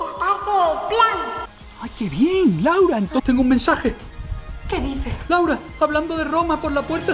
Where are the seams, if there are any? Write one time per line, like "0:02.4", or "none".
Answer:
0:03.2
0:05.2